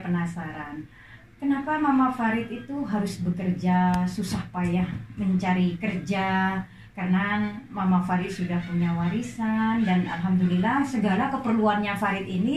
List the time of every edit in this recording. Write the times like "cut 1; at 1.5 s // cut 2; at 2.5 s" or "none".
none